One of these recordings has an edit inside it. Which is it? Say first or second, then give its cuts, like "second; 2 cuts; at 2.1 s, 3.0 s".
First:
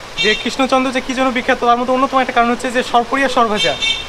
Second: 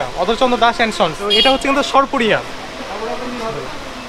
second; 1 cut; at 1.2 s